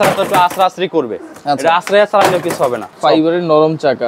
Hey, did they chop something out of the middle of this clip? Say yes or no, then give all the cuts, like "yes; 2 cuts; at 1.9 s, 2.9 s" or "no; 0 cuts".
yes; 1 cut; at 2.9 s